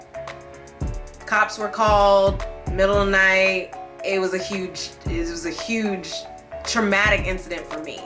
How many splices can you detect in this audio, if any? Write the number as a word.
one